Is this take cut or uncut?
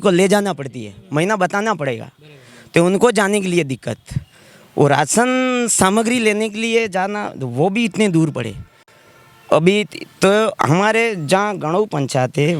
uncut